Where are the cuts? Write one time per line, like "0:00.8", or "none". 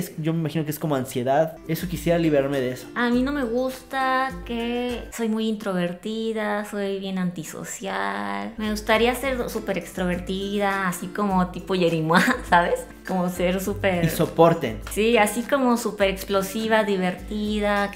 none